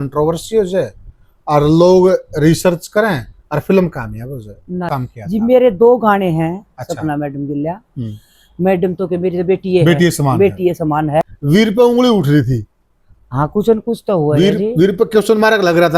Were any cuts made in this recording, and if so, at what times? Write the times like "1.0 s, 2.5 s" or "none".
4.9 s, 11.3 s